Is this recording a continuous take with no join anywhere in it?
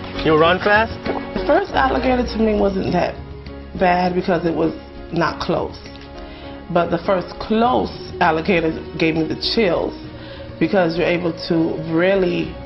no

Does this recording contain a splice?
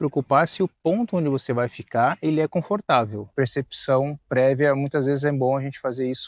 yes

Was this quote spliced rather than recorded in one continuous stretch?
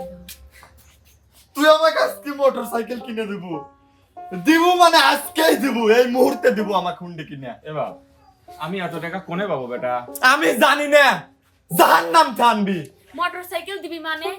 no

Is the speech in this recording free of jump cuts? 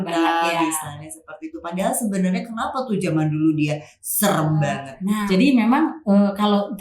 no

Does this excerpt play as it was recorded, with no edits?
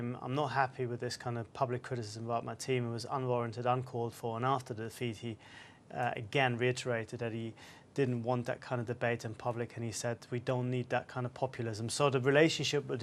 no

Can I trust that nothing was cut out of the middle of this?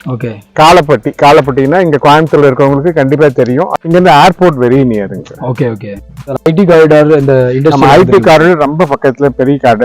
no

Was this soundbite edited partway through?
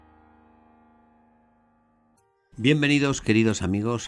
yes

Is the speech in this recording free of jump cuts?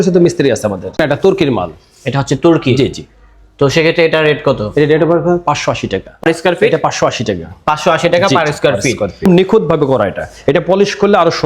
no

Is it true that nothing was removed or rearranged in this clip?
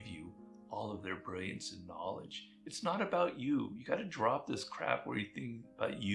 yes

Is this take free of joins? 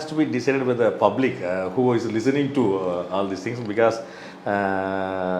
yes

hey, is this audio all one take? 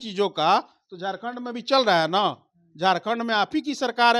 yes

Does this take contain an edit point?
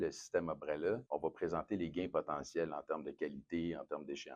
yes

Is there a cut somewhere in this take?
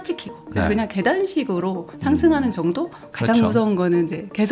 yes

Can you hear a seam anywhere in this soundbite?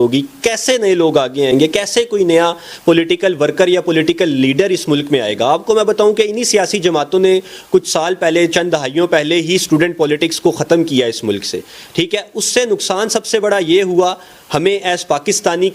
no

